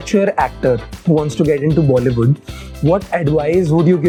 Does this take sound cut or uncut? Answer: uncut